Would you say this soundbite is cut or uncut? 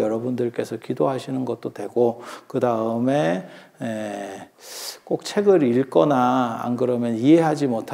uncut